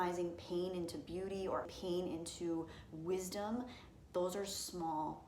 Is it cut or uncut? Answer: cut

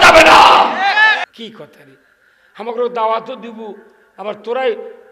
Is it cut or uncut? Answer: cut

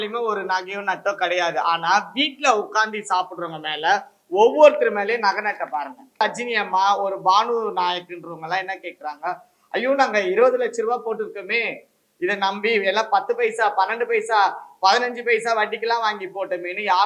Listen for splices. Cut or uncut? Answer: cut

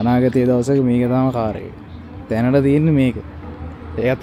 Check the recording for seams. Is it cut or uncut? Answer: uncut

